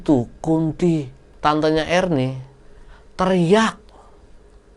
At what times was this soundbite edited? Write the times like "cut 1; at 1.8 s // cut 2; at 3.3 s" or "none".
cut 1; at 1.1 s